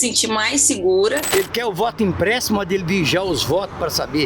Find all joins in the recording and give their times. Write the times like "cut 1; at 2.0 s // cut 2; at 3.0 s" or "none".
cut 1; at 1.2 s